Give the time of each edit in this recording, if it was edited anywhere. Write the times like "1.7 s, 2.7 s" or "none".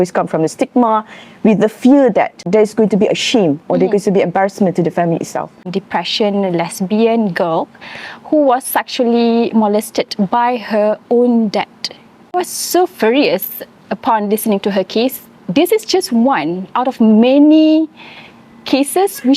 2.5 s, 5.7 s, 12.3 s